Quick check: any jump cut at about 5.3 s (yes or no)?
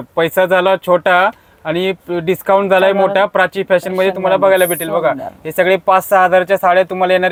no